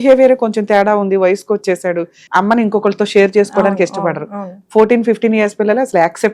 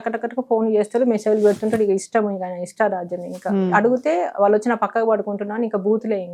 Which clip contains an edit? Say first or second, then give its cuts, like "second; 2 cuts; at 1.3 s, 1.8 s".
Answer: first; 1 cut; at 2.2 s